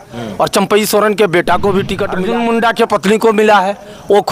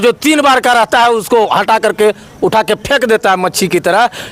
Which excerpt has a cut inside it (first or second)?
first